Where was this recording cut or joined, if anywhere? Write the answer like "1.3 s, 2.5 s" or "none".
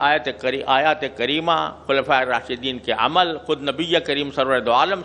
none